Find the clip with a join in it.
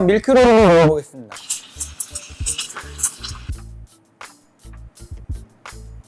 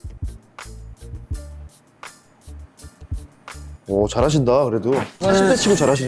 second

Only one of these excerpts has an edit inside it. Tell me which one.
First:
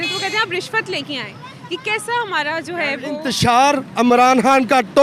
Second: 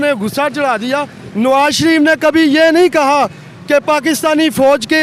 first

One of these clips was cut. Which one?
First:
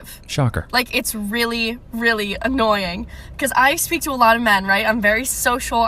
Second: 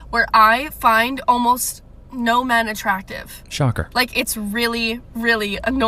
first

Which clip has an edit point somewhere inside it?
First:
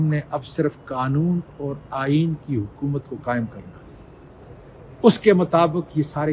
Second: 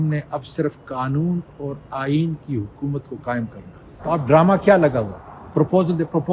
second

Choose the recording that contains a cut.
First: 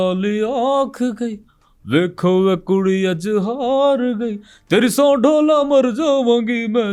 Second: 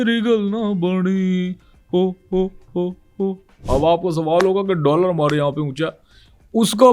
second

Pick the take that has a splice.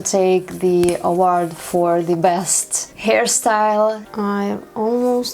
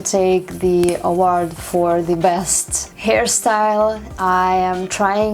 first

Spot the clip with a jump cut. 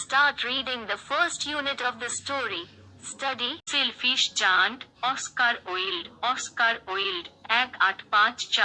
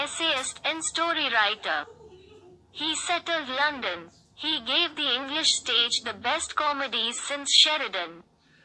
first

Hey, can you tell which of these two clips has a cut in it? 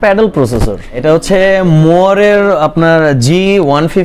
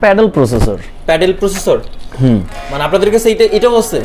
first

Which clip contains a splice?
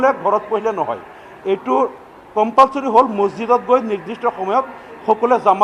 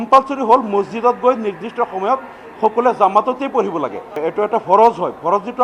second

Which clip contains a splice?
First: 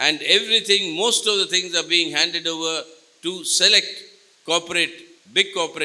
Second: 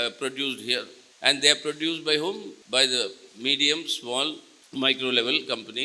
second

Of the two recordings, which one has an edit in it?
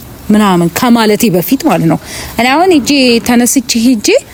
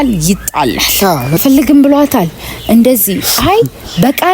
second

